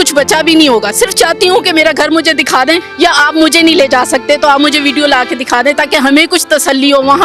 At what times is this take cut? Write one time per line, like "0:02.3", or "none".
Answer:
0:02.9